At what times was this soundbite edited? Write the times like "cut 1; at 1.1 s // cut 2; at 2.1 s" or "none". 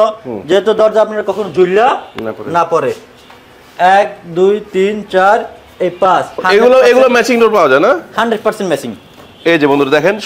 cut 1; at 6.4 s